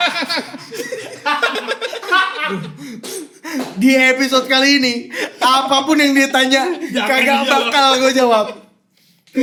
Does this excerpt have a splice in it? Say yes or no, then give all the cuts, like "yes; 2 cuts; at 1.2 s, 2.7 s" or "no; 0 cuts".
no; 0 cuts